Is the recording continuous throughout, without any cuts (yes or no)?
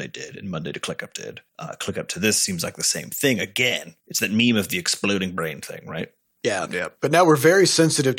no